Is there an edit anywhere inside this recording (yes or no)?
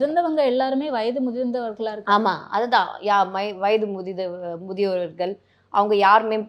no